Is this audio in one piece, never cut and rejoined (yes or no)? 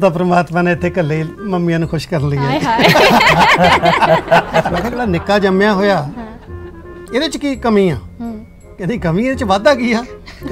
no